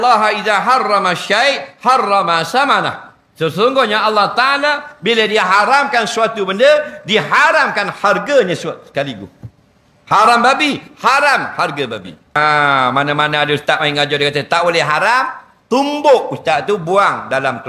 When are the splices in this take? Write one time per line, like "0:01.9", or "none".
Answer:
0:12.6